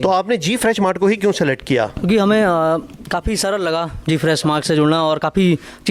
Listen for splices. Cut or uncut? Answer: uncut